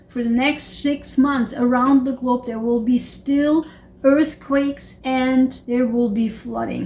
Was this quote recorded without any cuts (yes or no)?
no